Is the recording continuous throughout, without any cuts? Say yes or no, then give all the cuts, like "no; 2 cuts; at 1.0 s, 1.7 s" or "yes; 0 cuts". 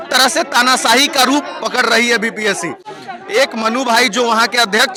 yes; 0 cuts